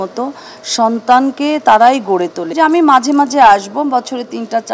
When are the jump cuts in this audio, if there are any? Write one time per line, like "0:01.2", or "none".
0:02.4

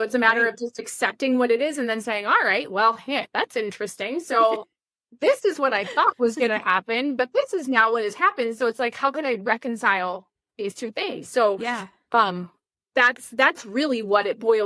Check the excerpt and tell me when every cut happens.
none

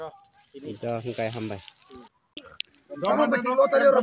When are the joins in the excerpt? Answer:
0:02.5

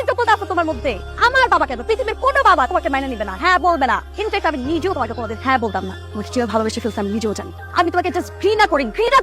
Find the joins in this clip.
none

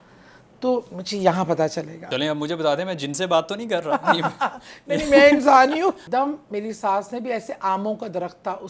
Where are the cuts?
0:02.0
0:06.0

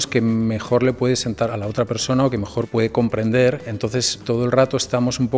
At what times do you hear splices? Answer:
0:01.5
0:02.7
0:04.2

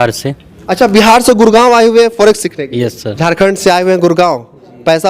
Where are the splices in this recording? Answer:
0:03.1

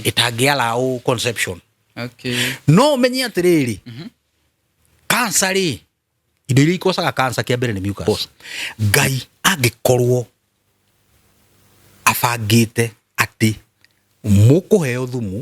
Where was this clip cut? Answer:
0:08.1

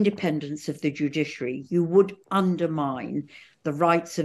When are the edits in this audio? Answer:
none

